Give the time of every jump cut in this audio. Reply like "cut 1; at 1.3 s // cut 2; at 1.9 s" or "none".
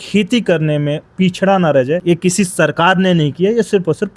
cut 1; at 2.0 s